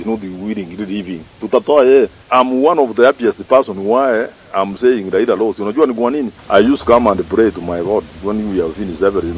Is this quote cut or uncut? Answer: cut